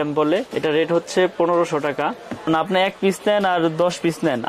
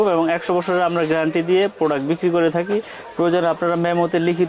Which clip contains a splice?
first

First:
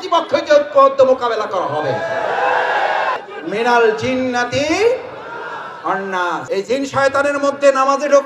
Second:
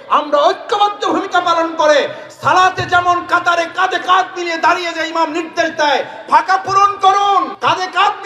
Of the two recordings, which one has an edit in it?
first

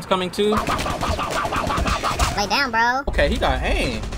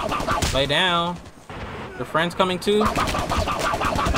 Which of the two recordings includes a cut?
first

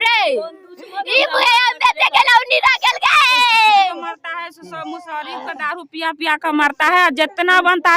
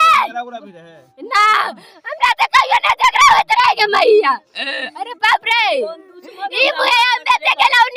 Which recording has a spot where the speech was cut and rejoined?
first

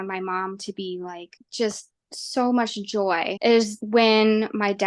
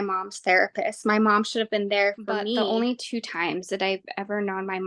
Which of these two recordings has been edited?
second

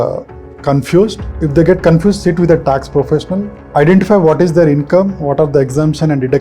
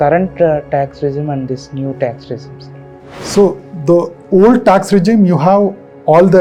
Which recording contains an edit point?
first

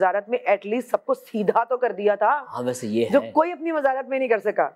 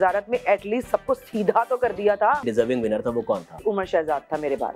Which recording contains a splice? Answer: second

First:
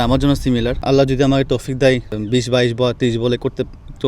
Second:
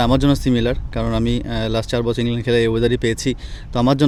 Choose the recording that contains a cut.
first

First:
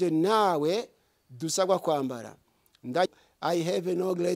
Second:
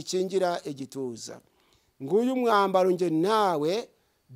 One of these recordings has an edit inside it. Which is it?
first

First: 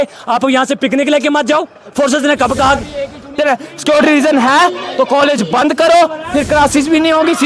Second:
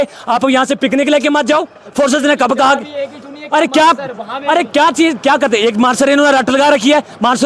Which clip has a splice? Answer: first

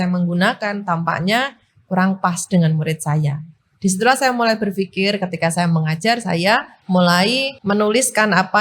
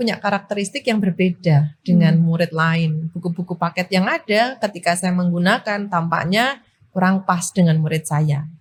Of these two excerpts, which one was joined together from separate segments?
first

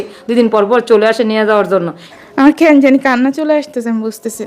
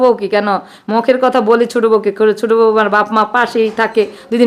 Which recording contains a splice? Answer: first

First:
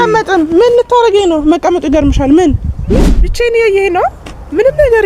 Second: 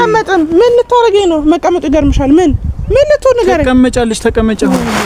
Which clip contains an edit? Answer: first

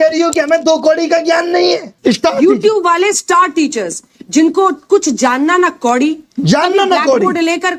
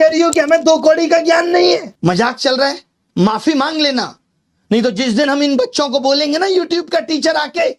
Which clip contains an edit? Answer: second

